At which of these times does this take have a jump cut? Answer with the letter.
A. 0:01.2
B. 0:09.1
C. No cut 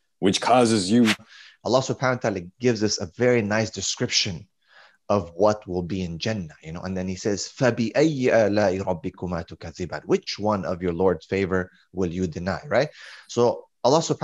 A